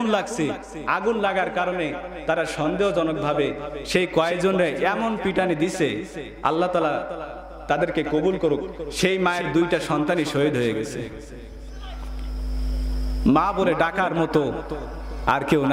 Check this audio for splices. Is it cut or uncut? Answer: uncut